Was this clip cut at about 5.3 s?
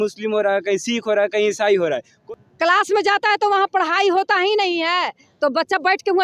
no; 1 cut; at 2.2 s

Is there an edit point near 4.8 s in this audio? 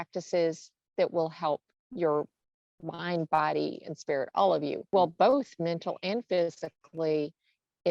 yes; 2 cuts; at 1.8 s, 4.8 s

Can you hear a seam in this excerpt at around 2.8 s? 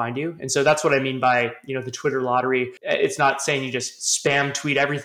yes; 1 cut; at 2.8 s

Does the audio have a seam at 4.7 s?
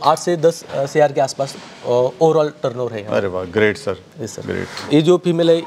yes; 1 cut; at 4.7 s

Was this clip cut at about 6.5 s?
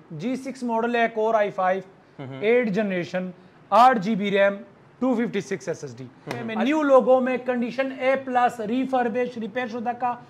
yes; 1 cut; at 6.5 s

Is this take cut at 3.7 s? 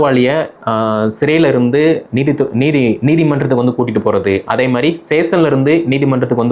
no; 0 cuts

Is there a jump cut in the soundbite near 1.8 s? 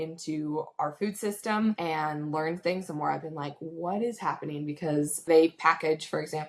yes; 2 cuts; at 1.8 s, 5.2 s

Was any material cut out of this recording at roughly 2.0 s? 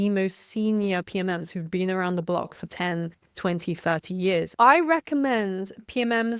no; 1 cut; at 4.5 s

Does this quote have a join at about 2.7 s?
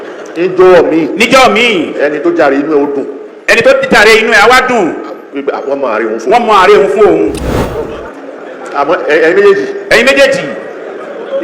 no; 1 cut; at 7.4 s

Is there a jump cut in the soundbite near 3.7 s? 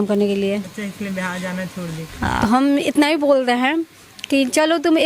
no; 1 cut; at 2.3 s

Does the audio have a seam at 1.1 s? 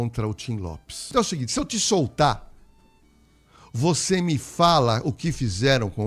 yes; 1 cut; at 1.1 s

